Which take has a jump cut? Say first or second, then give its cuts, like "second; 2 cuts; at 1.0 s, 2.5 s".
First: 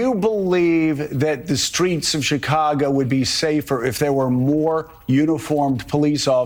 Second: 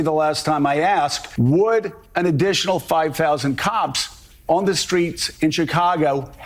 second; 1 cut; at 1.2 s